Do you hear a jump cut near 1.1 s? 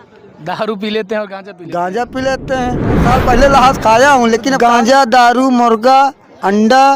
no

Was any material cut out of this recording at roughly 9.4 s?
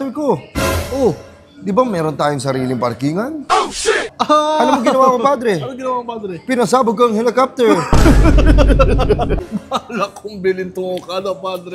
yes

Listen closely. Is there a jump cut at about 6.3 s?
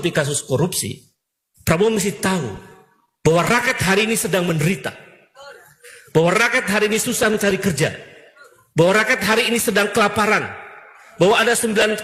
no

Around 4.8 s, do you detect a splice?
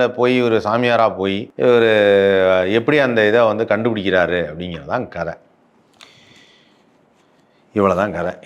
no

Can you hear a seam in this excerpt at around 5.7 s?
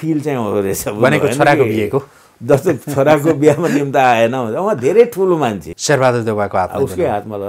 yes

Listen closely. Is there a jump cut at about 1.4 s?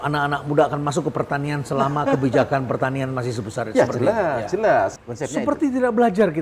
no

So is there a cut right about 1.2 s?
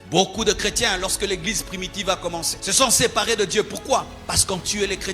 no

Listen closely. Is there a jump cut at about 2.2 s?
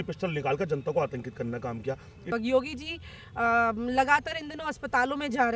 yes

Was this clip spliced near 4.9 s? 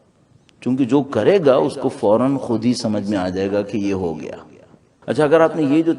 yes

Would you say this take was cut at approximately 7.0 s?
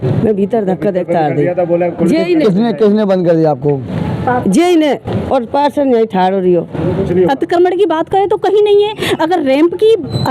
yes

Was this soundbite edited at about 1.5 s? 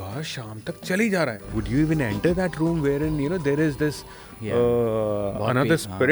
yes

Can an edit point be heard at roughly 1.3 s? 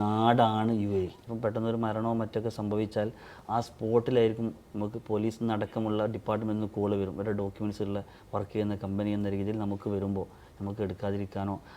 yes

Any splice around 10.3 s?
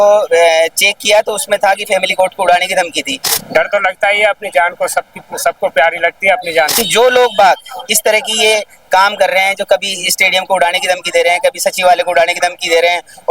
no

